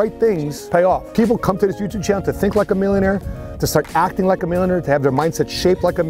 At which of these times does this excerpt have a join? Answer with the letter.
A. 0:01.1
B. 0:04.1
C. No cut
A